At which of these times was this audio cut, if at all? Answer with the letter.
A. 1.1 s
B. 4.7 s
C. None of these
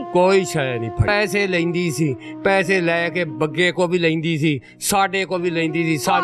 A